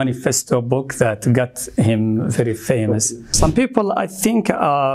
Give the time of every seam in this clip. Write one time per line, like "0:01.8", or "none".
0:03.2